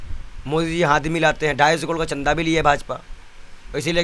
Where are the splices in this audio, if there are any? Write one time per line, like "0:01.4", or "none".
none